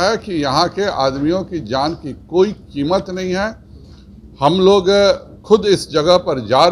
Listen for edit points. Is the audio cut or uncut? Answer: uncut